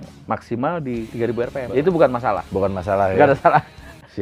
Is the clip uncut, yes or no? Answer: no